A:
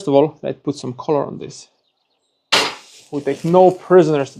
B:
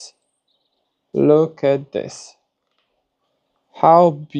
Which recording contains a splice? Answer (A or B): A